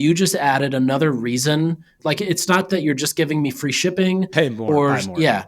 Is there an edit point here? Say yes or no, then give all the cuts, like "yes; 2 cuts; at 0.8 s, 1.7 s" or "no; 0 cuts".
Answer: yes; 1 cut; at 2.0 s